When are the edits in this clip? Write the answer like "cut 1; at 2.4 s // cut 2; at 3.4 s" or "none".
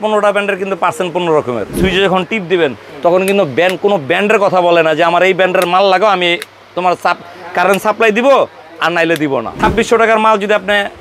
cut 1; at 1.8 s // cut 2; at 9.5 s